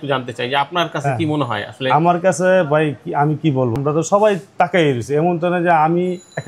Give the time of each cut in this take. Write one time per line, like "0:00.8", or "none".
none